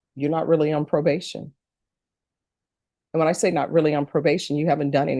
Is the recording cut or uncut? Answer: uncut